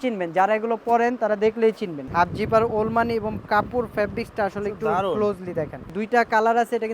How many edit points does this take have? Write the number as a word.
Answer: two